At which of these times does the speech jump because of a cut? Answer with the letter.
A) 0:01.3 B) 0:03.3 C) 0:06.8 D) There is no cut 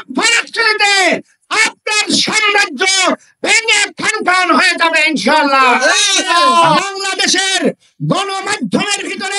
C